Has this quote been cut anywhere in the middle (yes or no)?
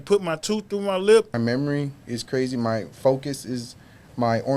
yes